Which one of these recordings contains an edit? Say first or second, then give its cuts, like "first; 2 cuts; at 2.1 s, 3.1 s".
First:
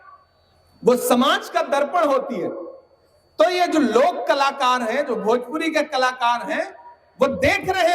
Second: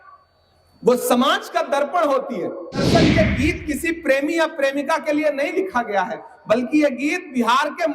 second; 1 cut; at 2.8 s